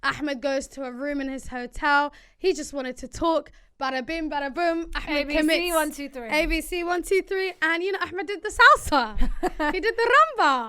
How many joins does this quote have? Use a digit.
0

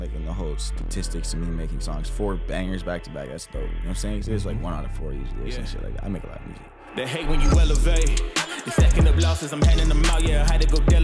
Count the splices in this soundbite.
1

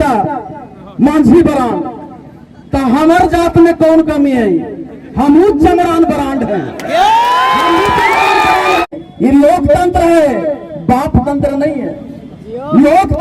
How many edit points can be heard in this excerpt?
1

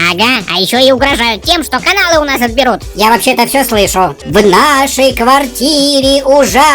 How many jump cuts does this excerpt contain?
1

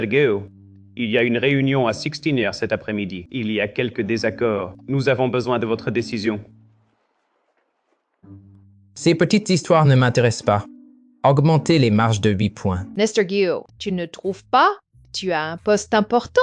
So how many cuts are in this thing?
3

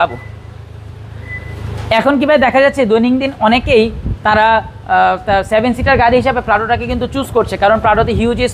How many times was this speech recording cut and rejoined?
0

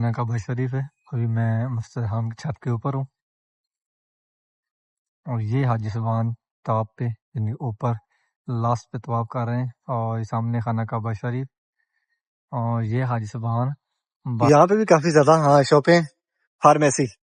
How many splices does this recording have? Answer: 1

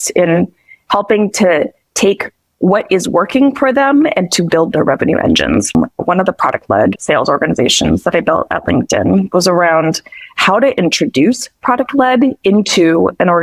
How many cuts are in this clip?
1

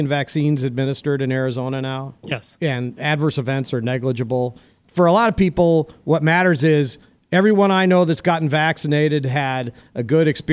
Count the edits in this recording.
1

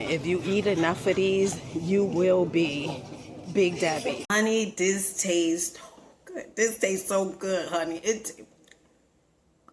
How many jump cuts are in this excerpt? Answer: 1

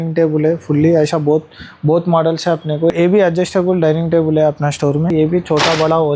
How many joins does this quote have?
2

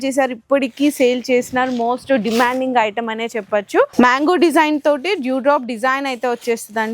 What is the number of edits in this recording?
1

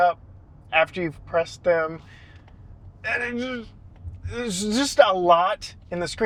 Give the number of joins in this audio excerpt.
0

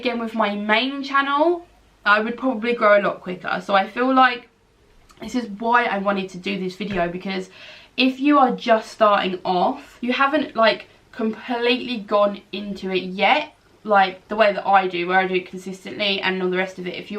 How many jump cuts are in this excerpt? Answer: 1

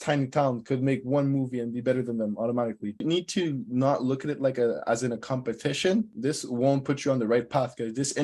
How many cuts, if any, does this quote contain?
2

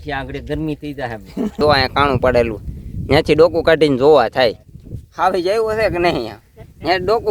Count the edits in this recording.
1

